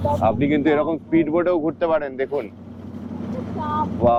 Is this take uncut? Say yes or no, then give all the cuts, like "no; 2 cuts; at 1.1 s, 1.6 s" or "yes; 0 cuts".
yes; 0 cuts